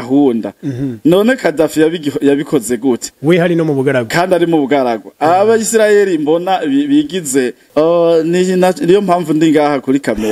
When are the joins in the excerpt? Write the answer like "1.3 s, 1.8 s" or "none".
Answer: 7.6 s

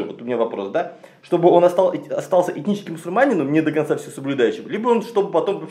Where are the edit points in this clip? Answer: none

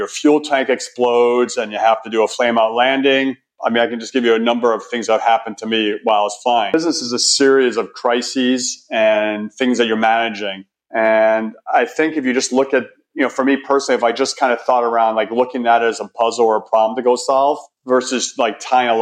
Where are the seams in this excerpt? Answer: 6.7 s

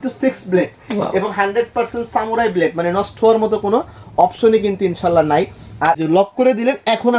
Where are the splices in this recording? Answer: 6.0 s

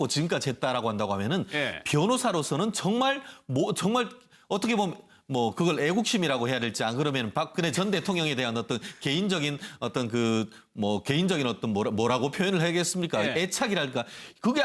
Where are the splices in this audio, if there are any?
none

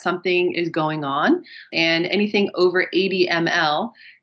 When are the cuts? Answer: 1.6 s

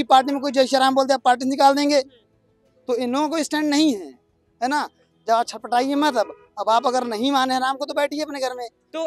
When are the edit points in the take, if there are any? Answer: none

